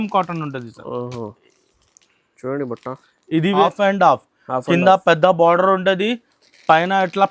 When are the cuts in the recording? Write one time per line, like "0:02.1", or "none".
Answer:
0:03.6